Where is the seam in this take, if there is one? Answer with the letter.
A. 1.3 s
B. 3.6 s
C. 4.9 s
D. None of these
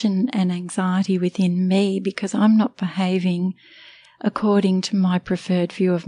D